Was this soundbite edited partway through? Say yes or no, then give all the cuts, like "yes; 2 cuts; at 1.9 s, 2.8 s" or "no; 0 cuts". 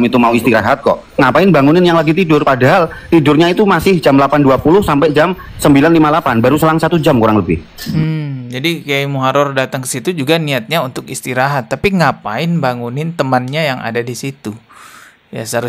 no; 0 cuts